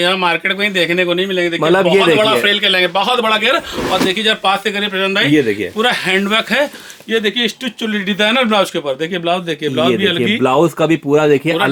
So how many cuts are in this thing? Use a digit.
0